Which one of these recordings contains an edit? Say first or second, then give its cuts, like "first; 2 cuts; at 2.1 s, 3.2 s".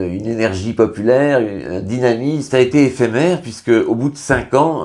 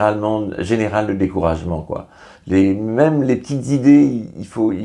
first; 1 cut; at 2.5 s